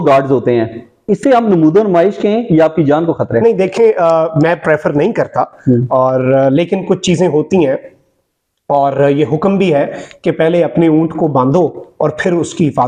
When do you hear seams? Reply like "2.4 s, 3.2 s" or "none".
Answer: none